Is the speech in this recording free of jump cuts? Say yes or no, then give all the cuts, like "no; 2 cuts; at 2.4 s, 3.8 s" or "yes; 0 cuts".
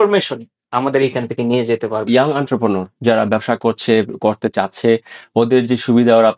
no; 1 cut; at 2.1 s